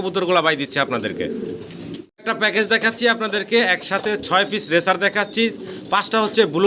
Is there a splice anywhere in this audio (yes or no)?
no